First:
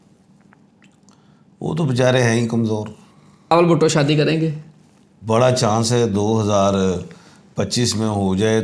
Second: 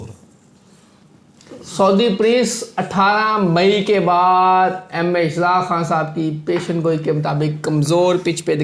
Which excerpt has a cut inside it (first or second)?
first